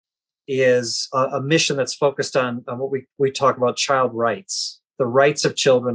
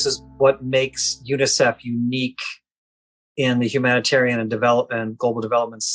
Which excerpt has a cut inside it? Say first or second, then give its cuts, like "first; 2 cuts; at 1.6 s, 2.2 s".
first; 1 cut; at 1.0 s